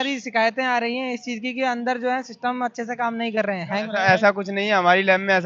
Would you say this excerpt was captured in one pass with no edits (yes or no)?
yes